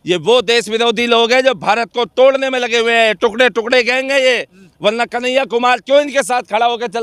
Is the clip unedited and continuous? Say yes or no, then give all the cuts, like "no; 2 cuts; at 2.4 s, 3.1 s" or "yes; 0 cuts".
yes; 0 cuts